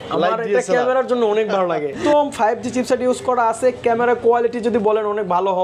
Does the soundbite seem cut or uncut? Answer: cut